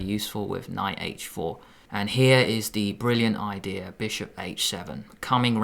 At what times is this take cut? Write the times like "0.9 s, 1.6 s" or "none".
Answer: 1.7 s